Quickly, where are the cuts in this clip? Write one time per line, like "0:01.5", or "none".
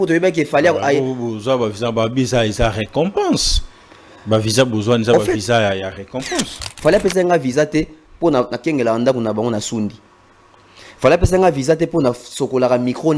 0:06.6